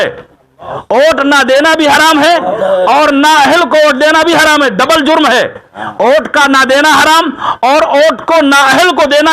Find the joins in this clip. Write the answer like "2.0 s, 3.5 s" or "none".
none